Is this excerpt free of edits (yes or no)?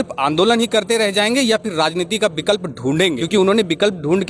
yes